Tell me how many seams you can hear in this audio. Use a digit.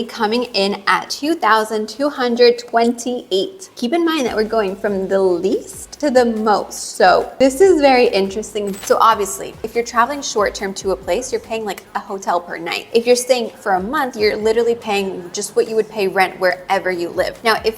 1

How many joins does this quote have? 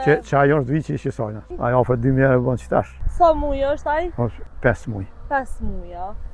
3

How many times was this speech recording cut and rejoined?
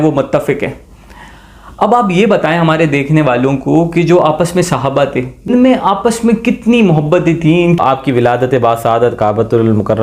2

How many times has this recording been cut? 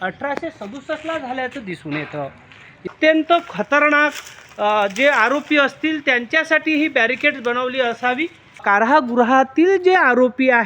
2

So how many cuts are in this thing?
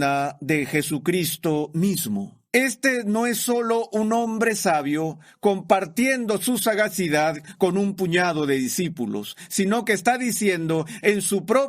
1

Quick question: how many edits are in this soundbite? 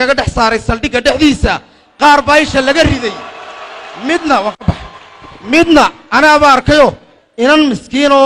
0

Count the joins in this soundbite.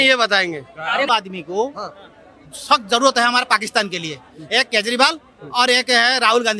1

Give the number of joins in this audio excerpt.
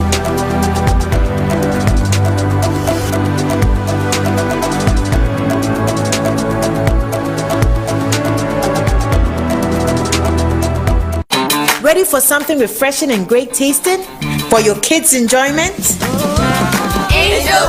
1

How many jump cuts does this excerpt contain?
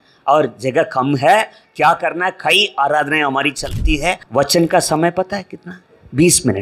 1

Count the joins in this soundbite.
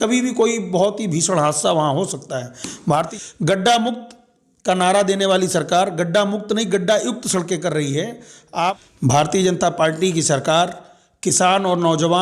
2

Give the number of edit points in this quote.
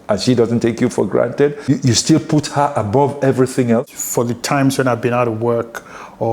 2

